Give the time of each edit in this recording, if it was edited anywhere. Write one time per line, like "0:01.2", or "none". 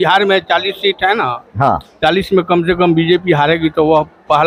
none